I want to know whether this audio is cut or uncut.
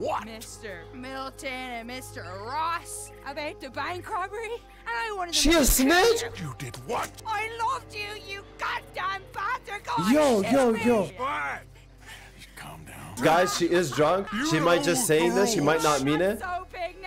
cut